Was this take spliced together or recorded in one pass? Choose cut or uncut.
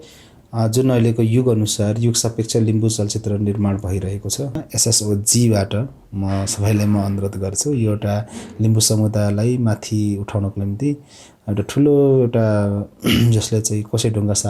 cut